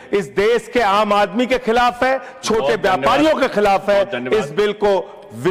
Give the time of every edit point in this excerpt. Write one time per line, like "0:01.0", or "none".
none